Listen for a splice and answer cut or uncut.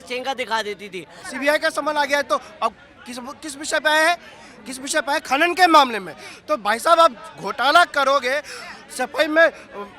cut